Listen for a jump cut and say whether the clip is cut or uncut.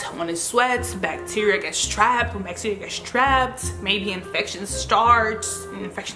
uncut